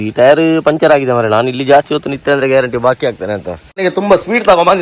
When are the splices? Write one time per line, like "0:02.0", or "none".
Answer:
0:03.6